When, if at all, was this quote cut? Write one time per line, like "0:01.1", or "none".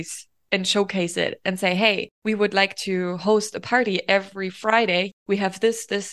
0:02.1
0:05.1